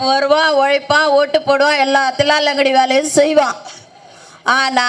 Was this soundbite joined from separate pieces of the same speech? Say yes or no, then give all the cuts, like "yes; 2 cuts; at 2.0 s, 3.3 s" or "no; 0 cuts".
no; 0 cuts